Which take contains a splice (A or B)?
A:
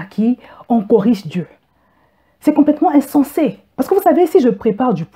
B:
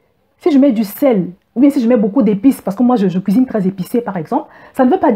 A